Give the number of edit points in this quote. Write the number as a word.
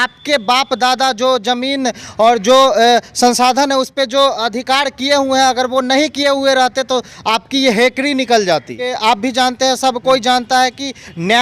one